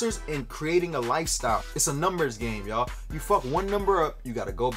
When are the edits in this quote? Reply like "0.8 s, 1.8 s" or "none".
1.6 s